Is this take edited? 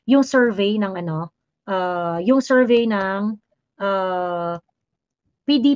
no; 0 cuts

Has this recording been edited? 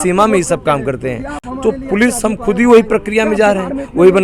no; 0 cuts

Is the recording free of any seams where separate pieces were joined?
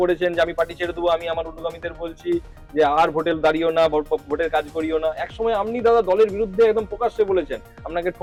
yes; 0 cuts

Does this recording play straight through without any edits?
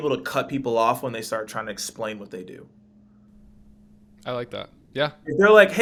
yes; 0 cuts

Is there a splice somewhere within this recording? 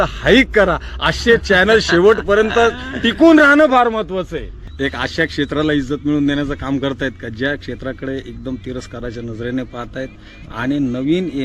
yes; 1 cut; at 4.6 s

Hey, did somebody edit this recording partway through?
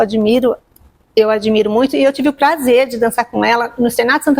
no; 0 cuts

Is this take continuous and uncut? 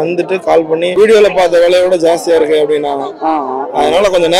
no; 1 cut; at 0.9 s

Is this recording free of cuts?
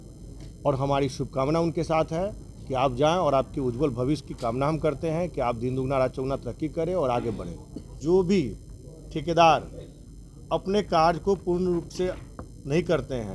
no; 1 cut; at 7.9 s

